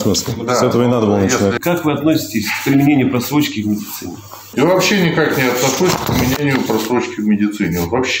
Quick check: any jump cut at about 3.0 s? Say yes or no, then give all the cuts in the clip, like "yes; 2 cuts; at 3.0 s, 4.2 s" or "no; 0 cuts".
no; 2 cuts; at 1.6 s, 4.4 s